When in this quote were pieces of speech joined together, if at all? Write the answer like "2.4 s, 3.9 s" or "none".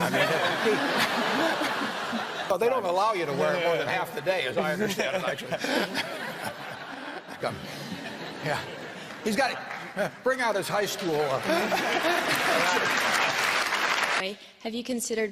2.5 s, 7.4 s, 14.2 s

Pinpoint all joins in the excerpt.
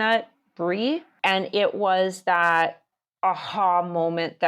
1.1 s

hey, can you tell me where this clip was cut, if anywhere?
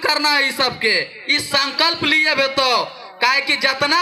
none

